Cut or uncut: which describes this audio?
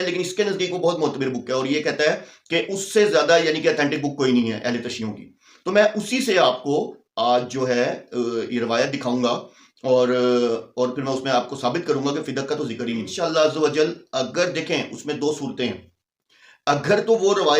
cut